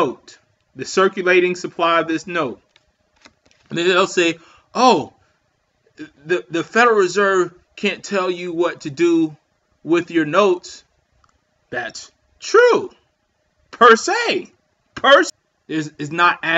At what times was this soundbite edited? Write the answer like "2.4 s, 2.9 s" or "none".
15.3 s

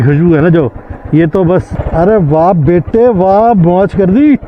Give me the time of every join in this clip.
1.7 s

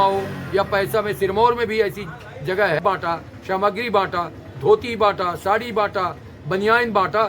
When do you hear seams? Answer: 2.8 s

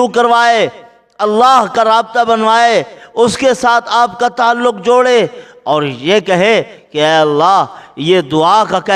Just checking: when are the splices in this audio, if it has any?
none

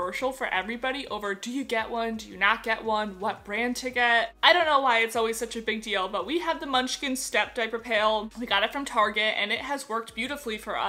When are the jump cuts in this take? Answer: none

